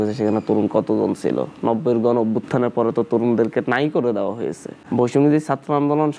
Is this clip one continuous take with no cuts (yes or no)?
no